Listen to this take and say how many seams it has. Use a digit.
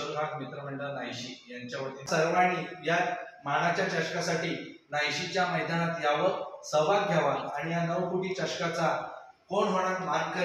1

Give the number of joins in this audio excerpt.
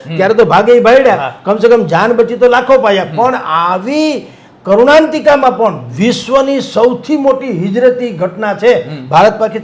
0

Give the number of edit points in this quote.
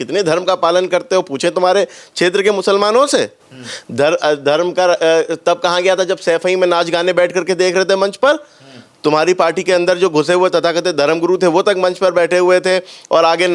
0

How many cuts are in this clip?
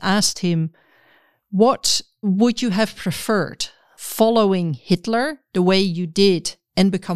1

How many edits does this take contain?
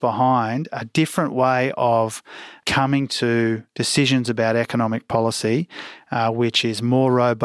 0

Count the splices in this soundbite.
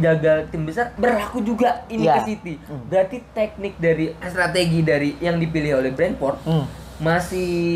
2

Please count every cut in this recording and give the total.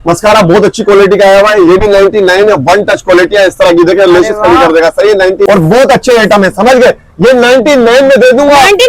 1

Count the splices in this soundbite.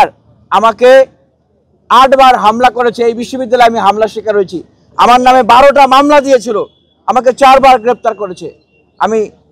0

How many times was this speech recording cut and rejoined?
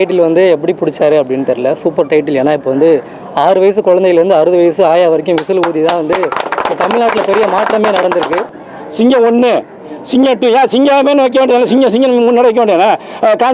1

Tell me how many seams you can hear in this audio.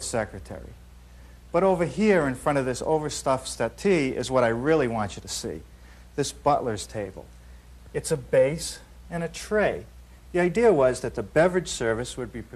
1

